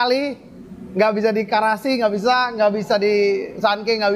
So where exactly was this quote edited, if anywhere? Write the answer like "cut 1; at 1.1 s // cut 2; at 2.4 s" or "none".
none